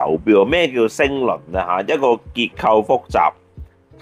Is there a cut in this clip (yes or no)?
no